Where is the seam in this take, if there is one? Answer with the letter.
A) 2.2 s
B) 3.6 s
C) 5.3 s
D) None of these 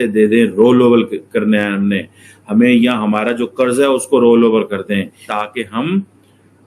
C